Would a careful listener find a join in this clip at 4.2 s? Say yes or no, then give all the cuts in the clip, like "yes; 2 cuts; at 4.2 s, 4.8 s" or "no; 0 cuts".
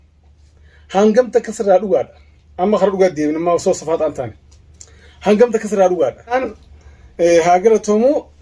no; 1 cut; at 6.3 s